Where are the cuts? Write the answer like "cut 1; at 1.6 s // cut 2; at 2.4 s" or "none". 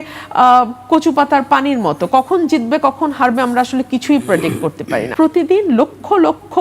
cut 1; at 5.1 s

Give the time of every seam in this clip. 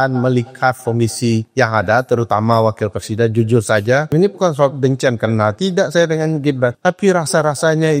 cut 1; at 1.5 s // cut 2; at 4.1 s // cut 3; at 6.8 s

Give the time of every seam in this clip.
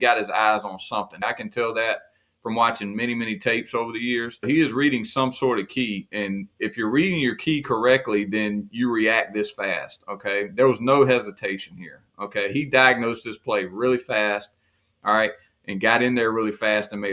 cut 1; at 1.2 s // cut 2; at 4.5 s // cut 3; at 6.0 s

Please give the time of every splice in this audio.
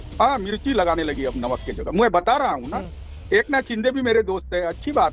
none

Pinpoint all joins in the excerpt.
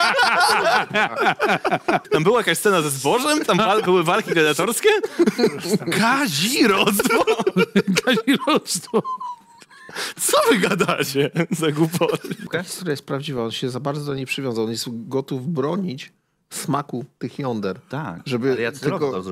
cut 1; at 2.1 s // cut 2; at 12.5 s

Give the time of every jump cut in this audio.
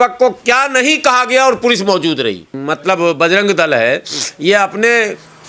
cut 1; at 2.5 s

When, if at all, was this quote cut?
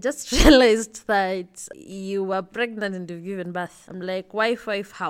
cut 1; at 1.7 s // cut 2; at 3.8 s

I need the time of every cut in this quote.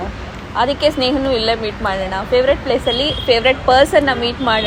none

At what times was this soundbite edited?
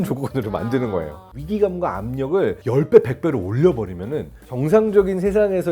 cut 1; at 1.4 s // cut 2; at 2.6 s // cut 3; at 4.5 s

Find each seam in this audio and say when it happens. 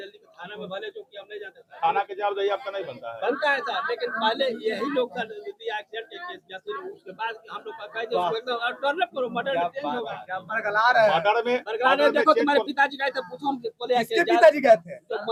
none

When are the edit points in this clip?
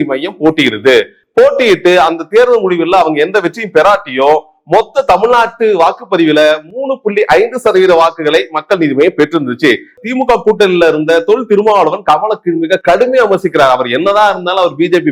cut 1; at 9.9 s

